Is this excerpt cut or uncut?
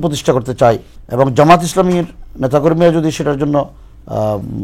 cut